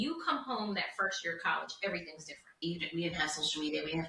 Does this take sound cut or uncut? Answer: cut